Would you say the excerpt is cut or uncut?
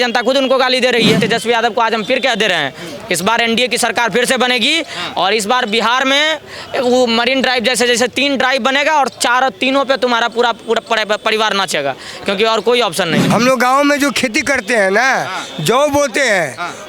cut